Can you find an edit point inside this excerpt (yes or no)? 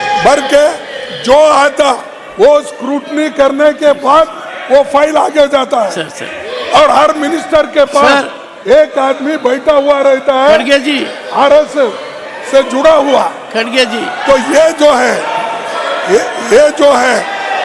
no